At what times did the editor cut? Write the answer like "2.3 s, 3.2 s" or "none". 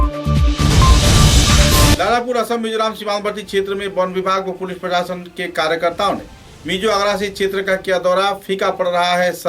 1.9 s

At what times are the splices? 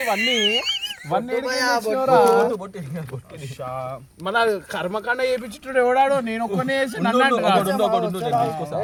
none

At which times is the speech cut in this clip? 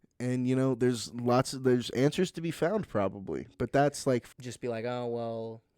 4.3 s

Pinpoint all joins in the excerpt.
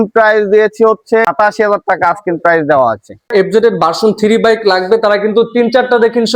1.2 s, 3.3 s

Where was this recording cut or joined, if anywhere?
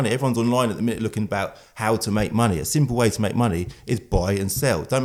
none

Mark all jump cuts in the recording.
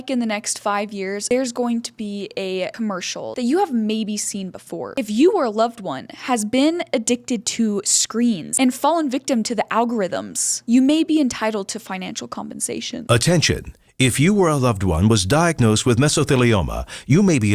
1.2 s, 2.7 s, 4.8 s

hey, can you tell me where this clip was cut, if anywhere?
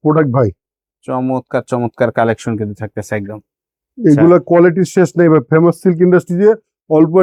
none

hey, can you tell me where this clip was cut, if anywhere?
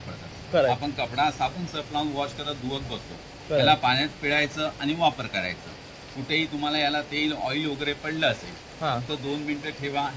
none

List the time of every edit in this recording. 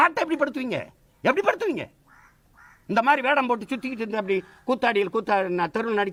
none

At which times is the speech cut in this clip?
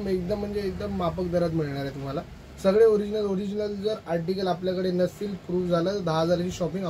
none

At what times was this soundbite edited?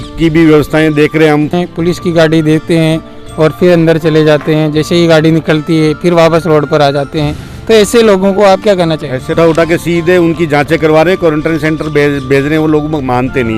1.5 s, 9.3 s

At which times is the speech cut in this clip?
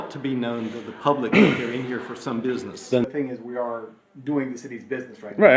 3.1 s

